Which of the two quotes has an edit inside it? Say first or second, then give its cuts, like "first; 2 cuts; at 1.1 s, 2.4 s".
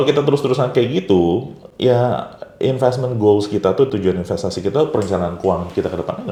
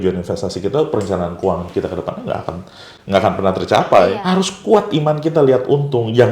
second; 1 cut; at 4.2 s